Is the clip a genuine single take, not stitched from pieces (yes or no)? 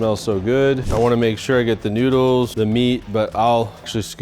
no